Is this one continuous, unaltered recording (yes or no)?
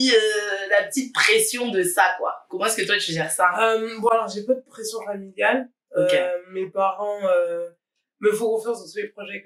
yes